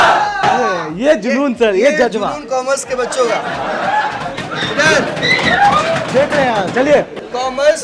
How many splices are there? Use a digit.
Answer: 0